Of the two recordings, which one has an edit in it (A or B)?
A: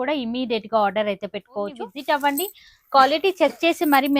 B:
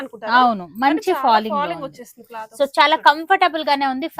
A